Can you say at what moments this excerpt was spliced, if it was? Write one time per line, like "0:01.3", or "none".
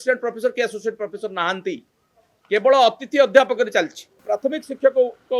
0:04.2